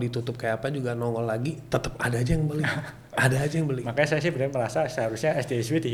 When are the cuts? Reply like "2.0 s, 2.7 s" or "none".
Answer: none